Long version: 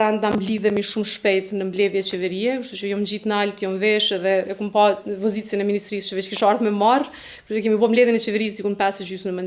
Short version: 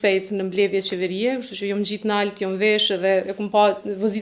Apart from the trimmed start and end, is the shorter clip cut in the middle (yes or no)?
no